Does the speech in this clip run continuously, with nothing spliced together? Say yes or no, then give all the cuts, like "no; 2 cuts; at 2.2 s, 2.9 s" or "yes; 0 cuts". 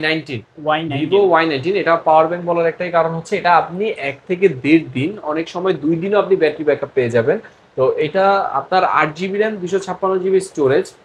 yes; 0 cuts